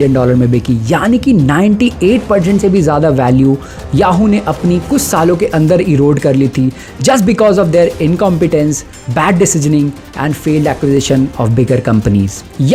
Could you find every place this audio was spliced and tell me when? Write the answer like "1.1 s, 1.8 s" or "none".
none